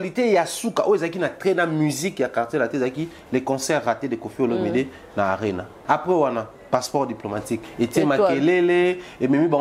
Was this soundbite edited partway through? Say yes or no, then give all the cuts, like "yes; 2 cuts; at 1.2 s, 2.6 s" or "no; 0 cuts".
yes; 2 cuts; at 5.8 s, 7.6 s